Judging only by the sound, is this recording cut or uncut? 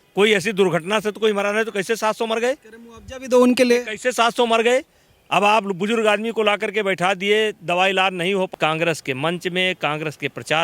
cut